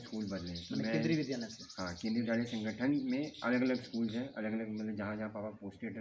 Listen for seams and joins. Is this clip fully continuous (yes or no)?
yes